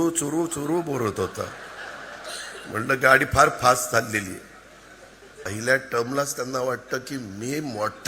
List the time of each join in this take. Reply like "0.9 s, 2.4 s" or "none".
5.5 s